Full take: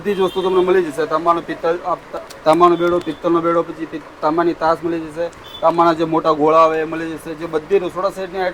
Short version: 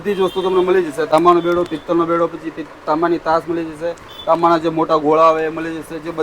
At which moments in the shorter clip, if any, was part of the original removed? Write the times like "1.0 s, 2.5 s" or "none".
1.1 s